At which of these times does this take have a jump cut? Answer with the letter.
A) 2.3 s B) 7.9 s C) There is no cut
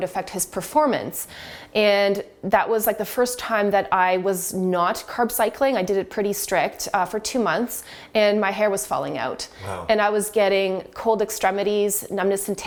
C